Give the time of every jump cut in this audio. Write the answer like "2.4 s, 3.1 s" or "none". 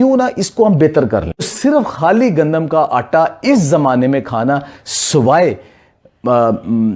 1.5 s